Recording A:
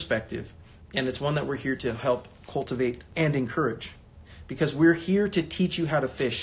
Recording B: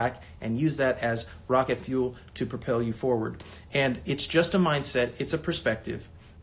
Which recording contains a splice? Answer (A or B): A